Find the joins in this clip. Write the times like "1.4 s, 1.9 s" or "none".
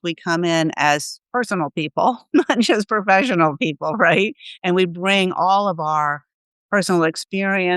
1.2 s